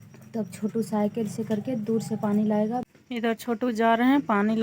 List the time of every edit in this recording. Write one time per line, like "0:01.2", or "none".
0:03.0